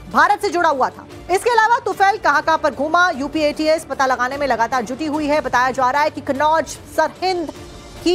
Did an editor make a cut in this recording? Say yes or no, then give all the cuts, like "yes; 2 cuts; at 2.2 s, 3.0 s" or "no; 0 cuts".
yes; 1 cut; at 2.2 s